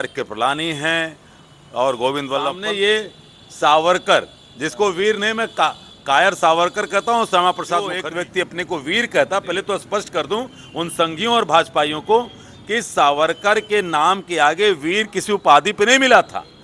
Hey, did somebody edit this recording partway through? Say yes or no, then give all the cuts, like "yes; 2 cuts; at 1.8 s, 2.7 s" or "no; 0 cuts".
yes; 2 cuts; at 2.6 s, 8.0 s